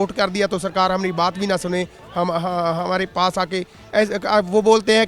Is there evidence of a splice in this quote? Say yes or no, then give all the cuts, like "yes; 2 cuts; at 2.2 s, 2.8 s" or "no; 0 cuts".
no; 0 cuts